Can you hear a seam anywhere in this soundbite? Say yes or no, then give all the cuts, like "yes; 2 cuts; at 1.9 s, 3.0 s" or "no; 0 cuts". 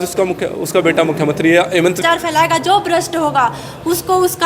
yes; 1 cut; at 2.0 s